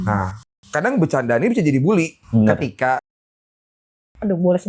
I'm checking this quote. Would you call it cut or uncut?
cut